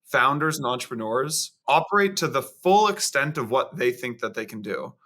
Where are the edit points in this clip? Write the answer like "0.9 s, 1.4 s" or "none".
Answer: 1.5 s